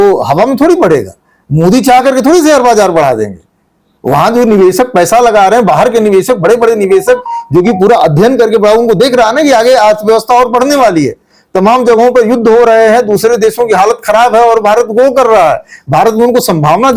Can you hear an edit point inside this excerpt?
no; 0 cuts

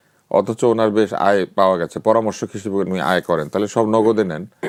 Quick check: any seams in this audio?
no; 0 cuts

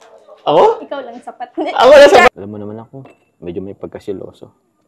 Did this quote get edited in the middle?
yes; 1 cut; at 2.3 s

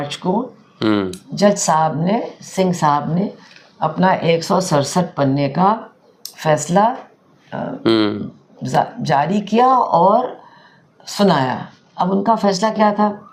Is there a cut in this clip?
no; 0 cuts

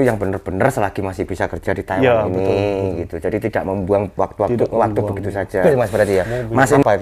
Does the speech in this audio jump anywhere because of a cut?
yes; 1 cut; at 5.6 s

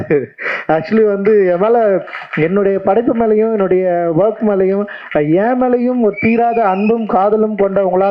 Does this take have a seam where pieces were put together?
no; 0 cuts

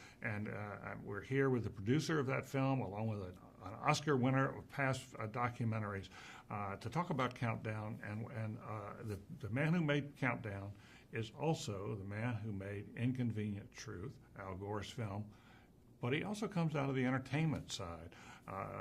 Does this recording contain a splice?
yes; 1 cut; at 12.3 s

